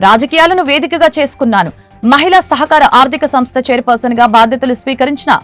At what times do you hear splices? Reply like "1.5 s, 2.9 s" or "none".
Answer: none

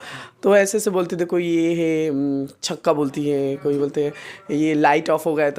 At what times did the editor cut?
none

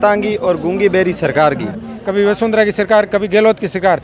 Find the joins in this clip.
1.9 s

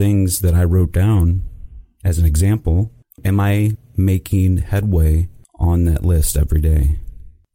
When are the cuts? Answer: 3.2 s

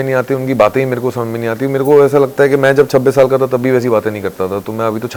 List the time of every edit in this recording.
none

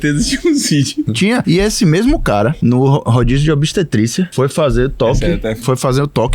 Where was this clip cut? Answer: 1.2 s, 2.6 s, 4.3 s, 5.6 s

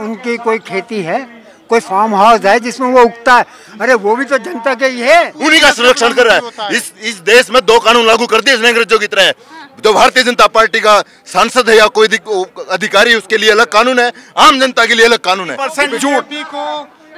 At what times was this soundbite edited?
5.3 s, 15.7 s

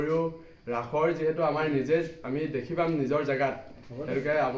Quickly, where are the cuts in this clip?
none

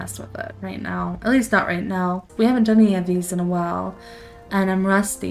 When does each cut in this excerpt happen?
2.2 s

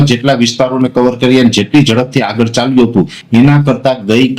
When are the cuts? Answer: none

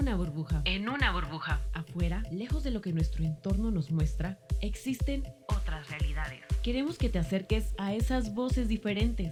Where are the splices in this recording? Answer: none

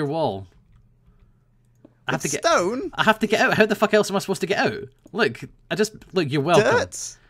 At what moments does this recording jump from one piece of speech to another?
3.3 s

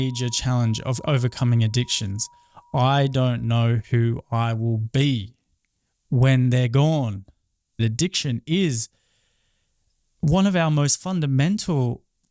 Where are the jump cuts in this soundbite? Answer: 7.8 s

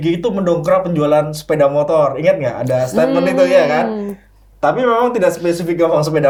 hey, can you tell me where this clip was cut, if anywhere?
none

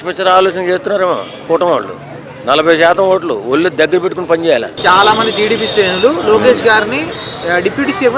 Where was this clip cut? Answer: 4.7 s

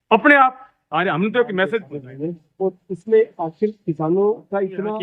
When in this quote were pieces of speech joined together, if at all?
2.0 s

